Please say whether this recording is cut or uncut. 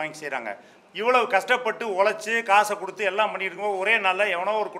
uncut